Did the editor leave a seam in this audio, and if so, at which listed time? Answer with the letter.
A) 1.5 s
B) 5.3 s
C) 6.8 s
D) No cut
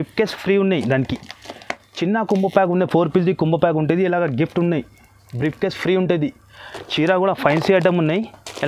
D